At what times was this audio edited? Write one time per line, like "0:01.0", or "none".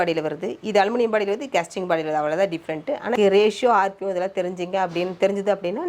0:03.1

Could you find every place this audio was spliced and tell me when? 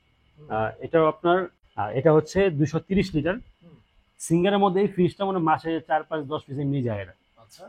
0:01.6

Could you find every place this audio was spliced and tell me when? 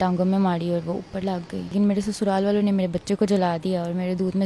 0:01.7

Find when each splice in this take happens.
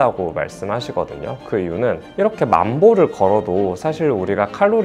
none

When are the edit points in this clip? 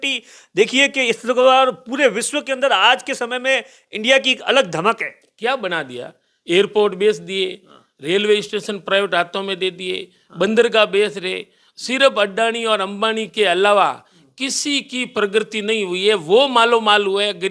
none

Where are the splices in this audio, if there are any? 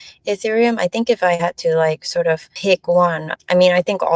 0:02.5
0:03.3

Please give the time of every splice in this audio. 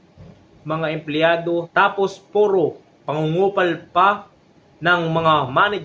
0:01.7

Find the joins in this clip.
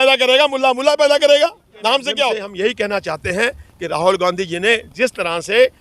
0:02.4

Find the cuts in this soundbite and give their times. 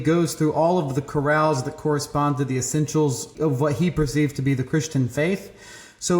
0:03.3

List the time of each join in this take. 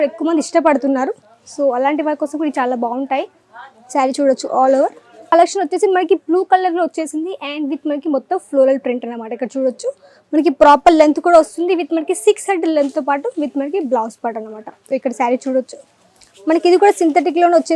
0:05.3

